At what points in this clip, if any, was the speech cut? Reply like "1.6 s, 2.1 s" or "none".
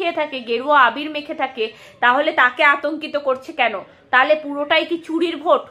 none